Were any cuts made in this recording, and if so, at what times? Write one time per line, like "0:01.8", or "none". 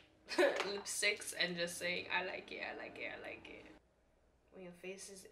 0:03.8